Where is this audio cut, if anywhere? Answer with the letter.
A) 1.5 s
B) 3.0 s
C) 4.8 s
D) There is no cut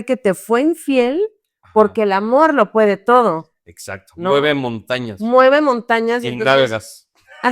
D